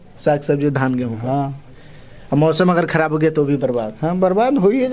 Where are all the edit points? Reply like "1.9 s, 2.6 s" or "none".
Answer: none

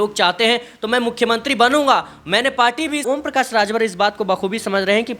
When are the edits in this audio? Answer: 3.0 s

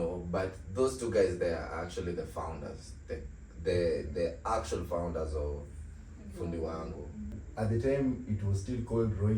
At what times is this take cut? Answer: 7.4 s

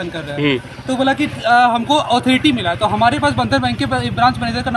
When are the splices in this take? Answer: none

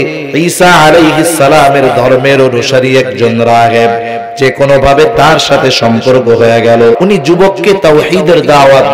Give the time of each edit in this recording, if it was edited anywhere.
7.0 s

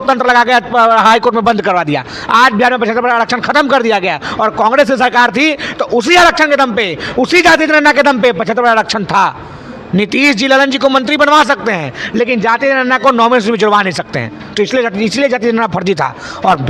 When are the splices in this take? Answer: none

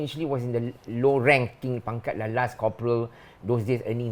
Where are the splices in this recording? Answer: none

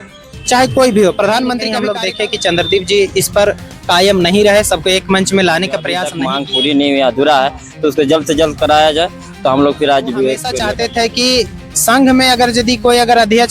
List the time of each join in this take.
1.8 s, 6.1 s, 10.5 s

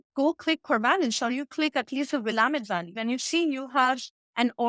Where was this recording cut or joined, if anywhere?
3.0 s

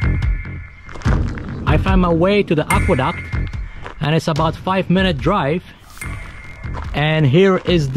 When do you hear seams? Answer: 1.7 s

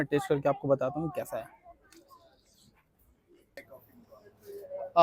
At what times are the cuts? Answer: 3.6 s

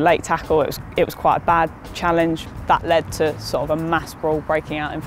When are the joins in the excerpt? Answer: 2.6 s, 3.7 s

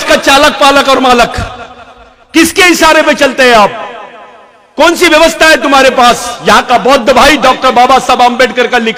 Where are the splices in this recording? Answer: none

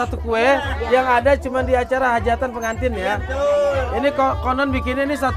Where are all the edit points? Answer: none

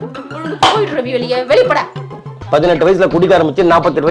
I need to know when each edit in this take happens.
2.3 s

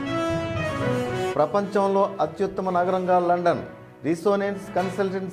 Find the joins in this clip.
1.3 s

